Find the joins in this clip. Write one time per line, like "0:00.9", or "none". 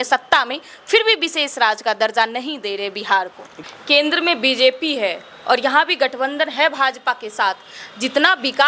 0:03.5